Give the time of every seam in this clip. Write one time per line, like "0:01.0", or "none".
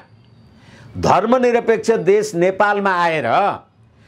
none

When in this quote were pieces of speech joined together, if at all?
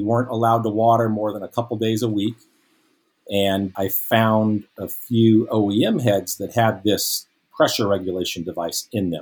0:03.7

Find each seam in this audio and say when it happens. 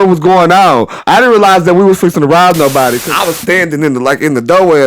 0:03.0

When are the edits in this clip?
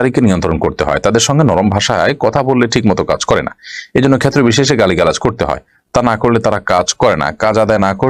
none

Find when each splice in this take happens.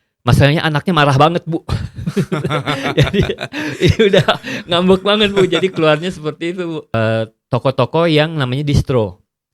0:06.9

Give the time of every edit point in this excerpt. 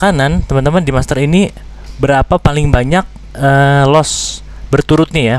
none

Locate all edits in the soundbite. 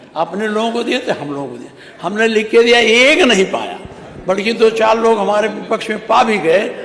none

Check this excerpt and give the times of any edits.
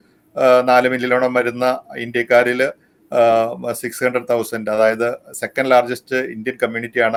none

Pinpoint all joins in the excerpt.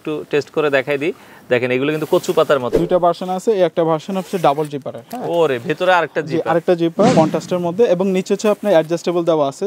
0:02.7
0:07.1

